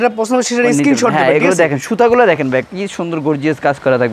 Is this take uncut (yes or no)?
yes